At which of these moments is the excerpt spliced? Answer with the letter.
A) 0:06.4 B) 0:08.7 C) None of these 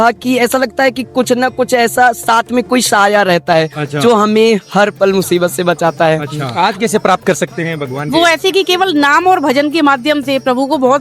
A